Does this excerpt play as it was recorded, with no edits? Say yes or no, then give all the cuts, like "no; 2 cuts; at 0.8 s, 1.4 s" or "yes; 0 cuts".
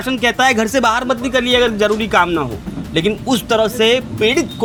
yes; 0 cuts